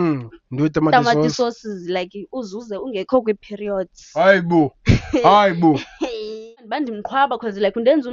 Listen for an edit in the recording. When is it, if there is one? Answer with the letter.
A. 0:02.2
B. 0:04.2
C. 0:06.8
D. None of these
C